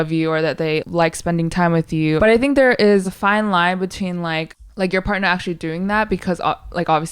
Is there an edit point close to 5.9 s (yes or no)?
no